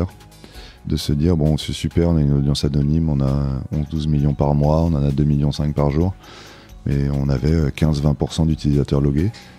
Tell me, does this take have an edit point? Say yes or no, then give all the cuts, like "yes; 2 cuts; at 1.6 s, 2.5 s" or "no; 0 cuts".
no; 0 cuts